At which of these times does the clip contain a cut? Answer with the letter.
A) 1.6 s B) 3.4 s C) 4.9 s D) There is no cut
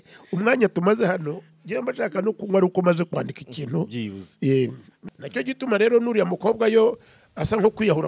C